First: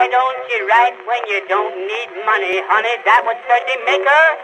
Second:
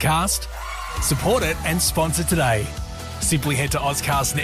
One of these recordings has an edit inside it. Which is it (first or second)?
first